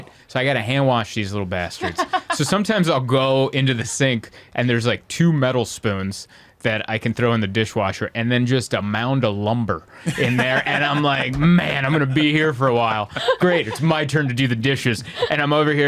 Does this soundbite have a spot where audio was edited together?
no; 0 cuts

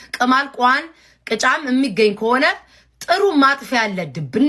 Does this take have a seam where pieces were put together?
no; 0 cuts

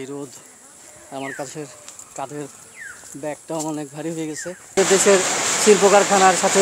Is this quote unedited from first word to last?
no; 1 cut; at 4.8 s

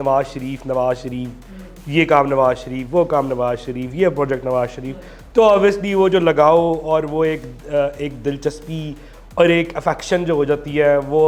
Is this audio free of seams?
yes; 0 cuts

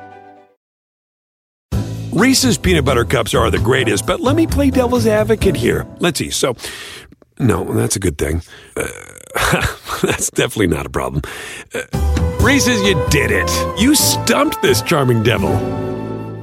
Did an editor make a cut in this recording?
no; 0 cuts

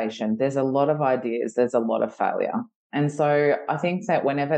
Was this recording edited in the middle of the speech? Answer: no; 0 cuts

